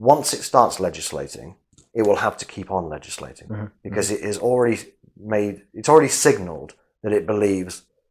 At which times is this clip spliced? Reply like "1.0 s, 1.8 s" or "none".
none